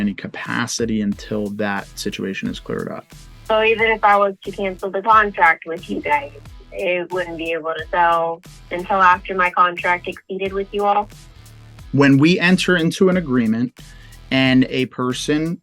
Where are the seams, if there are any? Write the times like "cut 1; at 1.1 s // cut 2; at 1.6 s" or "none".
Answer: cut 1; at 11.4 s